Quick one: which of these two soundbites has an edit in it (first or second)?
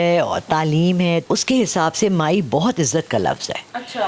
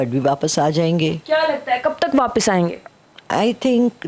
first